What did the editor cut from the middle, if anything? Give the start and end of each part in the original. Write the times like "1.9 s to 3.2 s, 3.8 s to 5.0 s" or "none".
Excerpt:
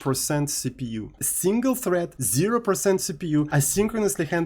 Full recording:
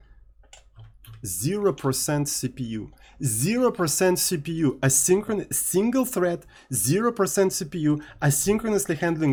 3.0 s to 5.6 s, 6.5 s to 6.7 s, 8.0 s to 8.2 s